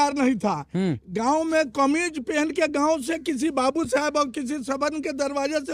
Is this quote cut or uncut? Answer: uncut